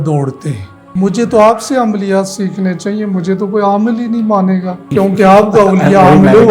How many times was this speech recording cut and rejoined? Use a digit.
2